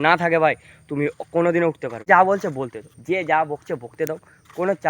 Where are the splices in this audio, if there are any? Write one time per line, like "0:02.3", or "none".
0:02.1